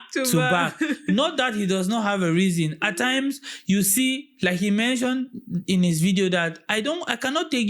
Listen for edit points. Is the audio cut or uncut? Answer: uncut